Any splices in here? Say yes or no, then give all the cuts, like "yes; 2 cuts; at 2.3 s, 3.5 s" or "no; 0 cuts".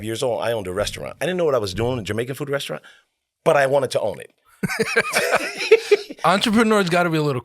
no; 0 cuts